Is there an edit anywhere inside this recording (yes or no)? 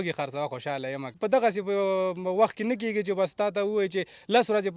yes